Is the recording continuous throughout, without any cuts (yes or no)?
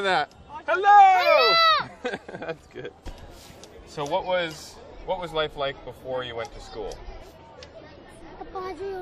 yes